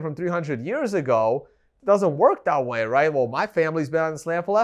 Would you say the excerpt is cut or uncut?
cut